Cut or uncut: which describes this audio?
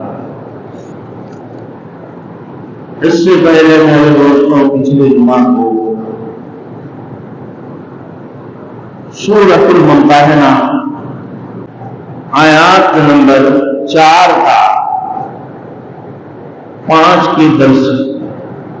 cut